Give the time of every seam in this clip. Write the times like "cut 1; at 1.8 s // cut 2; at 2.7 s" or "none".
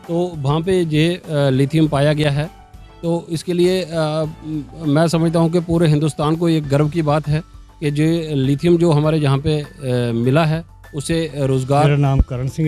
none